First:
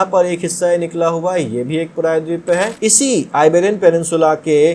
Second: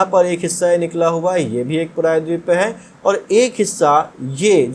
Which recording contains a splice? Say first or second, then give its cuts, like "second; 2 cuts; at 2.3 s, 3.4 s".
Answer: first; 1 cut; at 2.7 s